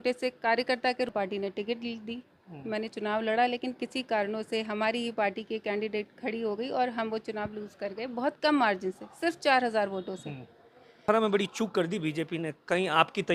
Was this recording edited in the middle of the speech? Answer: yes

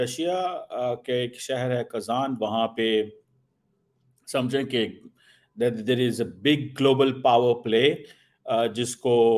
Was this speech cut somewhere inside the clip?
no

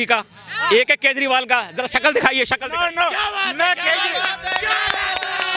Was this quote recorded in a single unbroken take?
yes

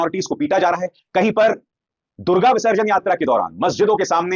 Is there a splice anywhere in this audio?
no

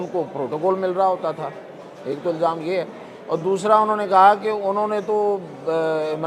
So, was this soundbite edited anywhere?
no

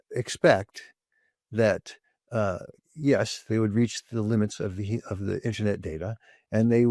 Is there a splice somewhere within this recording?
no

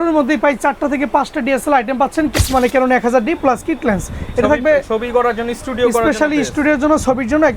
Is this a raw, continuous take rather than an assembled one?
no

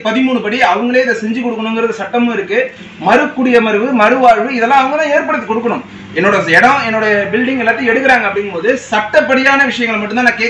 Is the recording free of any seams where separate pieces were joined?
yes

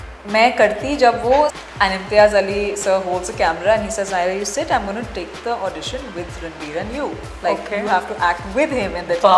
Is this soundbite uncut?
no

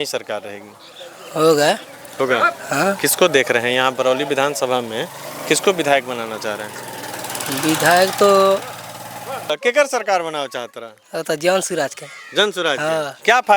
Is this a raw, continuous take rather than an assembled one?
no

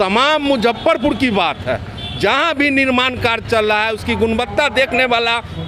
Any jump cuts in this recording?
no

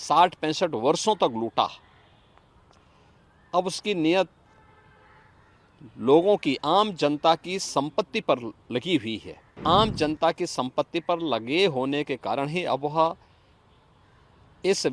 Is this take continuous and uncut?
no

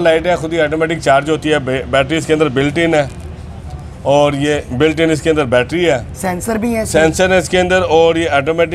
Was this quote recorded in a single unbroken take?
yes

